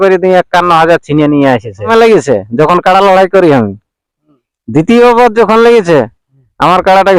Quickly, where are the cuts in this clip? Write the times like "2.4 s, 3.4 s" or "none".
1.9 s